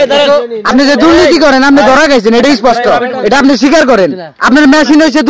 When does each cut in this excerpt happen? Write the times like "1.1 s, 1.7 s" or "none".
4.3 s